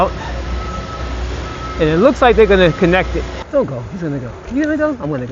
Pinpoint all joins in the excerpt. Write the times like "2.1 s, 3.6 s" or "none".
3.4 s